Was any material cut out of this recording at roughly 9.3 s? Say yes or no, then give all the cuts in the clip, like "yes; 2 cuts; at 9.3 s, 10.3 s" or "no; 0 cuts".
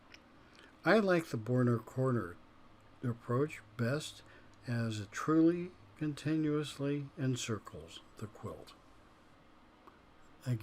yes; 1 cut; at 9.3 s